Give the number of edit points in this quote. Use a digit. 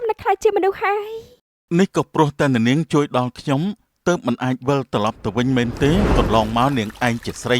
1